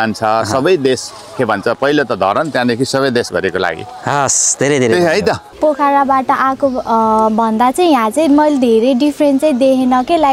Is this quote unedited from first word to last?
no; 1 cut; at 5.5 s

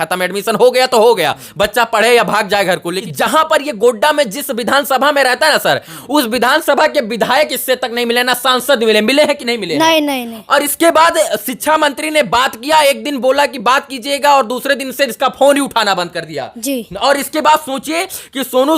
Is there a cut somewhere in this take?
yes; 1 cut; at 3.0 s

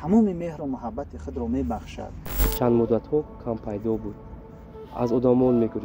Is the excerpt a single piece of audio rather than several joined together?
no; 1 cut; at 2.3 s

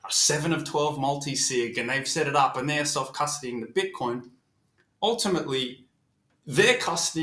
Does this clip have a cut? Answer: no; 0 cuts

